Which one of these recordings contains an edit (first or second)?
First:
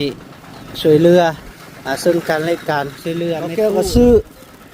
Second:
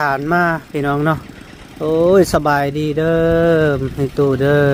first